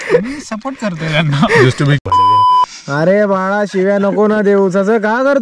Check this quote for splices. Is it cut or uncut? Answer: cut